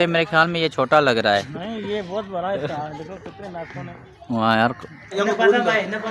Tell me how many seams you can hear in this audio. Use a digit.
1